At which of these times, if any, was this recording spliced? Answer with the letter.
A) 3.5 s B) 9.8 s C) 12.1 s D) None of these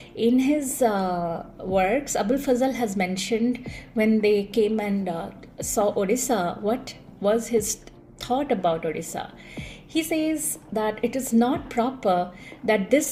D